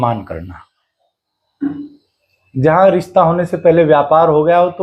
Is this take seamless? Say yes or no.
yes